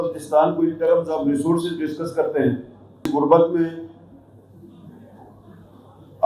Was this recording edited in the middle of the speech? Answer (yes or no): yes